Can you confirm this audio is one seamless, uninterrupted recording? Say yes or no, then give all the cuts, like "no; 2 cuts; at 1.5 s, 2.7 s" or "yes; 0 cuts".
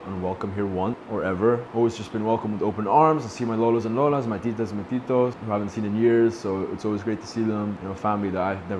yes; 0 cuts